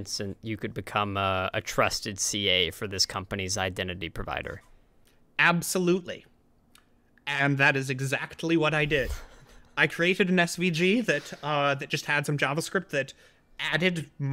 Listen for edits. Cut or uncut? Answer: uncut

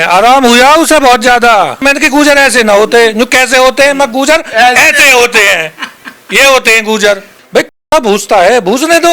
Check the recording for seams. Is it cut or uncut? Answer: cut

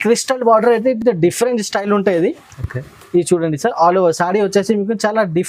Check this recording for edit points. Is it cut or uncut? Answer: uncut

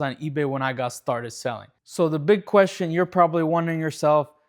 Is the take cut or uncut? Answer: cut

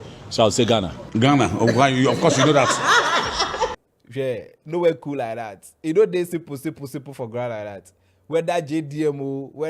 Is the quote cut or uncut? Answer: cut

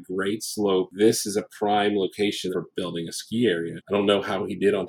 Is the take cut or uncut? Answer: cut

